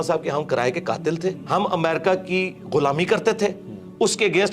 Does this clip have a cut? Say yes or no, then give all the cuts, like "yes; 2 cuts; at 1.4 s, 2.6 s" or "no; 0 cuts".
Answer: yes; 1 cut; at 1.4 s